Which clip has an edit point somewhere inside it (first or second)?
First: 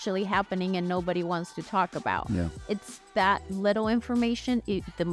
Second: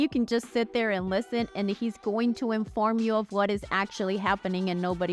first